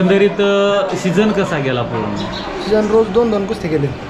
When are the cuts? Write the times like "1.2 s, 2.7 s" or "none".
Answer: none